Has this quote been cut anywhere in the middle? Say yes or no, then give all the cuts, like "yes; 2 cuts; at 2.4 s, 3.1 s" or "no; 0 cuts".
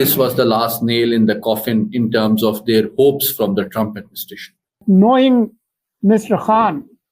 yes; 1 cut; at 4.8 s